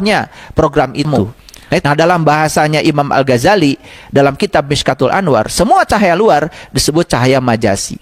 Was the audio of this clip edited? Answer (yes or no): yes